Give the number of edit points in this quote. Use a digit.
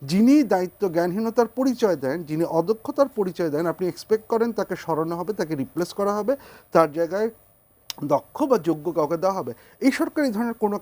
0